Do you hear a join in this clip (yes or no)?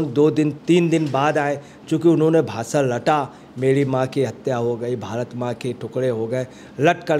no